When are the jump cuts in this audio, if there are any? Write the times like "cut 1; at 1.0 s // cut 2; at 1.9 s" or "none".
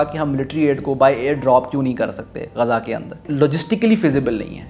cut 1; at 3.2 s